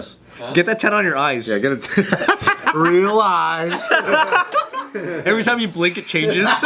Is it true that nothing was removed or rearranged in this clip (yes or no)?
yes